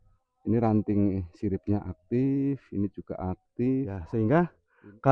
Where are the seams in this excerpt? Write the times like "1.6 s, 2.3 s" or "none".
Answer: 4.0 s